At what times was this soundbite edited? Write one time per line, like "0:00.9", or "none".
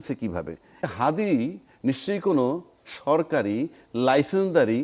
0:00.9

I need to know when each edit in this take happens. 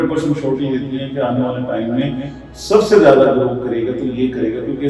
none

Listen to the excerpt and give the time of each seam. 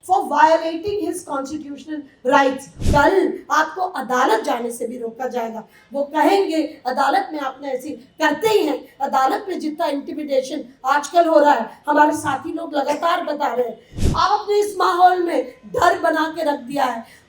0:02.7
0:13.9

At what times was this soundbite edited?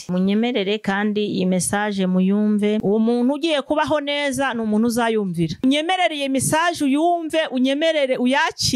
0:02.8
0:05.6

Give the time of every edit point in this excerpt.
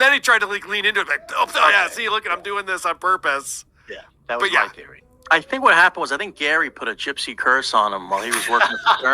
none

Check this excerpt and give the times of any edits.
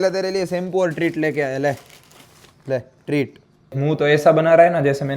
0:03.7

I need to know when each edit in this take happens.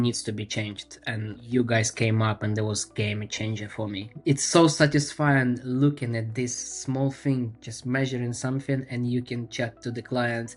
0:01.4
0:04.1

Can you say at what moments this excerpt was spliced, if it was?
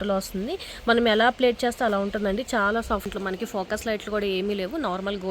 0:03.1

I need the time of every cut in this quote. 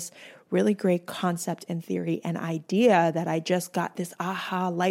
none

